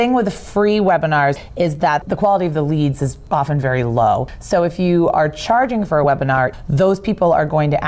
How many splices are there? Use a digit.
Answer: 3